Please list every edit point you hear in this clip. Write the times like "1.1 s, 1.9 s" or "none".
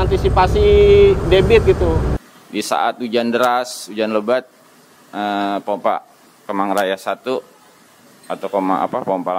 2.2 s